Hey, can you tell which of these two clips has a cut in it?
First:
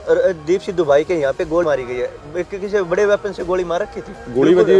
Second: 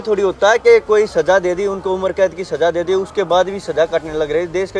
first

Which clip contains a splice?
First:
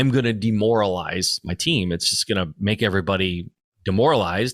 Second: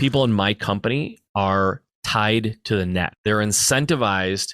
second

